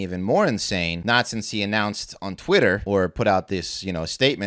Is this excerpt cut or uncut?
cut